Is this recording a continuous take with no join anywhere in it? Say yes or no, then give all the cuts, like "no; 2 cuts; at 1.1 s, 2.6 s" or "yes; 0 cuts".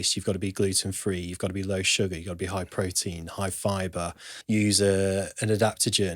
no; 1 cut; at 4.3 s